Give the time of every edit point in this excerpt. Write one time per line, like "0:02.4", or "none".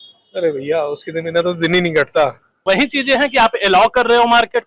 0:02.5